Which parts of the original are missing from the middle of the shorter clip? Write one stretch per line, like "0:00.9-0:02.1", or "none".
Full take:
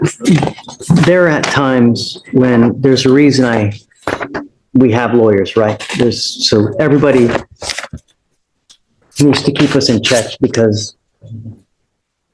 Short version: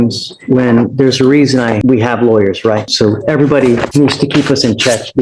0:03.6-0:04.7
0:05.8-0:06.4
0:07.4-0:09.1